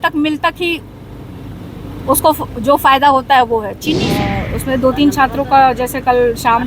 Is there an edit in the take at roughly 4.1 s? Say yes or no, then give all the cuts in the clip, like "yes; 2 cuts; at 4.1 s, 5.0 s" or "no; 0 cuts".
yes; 1 cut; at 4.1 s